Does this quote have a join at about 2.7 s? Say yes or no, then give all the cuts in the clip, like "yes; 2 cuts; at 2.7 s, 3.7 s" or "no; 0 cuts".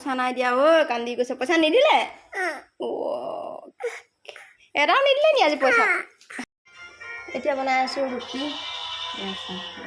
no; 1 cut; at 6.2 s